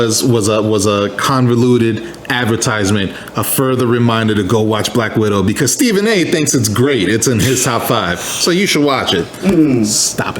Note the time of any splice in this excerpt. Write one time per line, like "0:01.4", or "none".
none